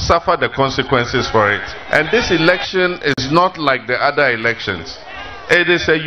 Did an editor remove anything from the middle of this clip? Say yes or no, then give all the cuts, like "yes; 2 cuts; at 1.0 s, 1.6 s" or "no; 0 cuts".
yes; 1 cut; at 1.7 s